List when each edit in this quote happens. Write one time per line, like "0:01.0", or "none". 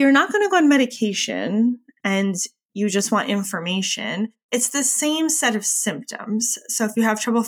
none